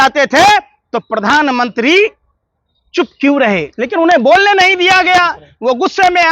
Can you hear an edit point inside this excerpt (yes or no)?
yes